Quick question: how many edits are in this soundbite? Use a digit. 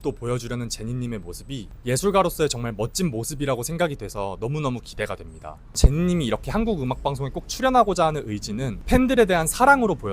1